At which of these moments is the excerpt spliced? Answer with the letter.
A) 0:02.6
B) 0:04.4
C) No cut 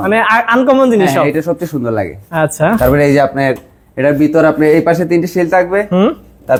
C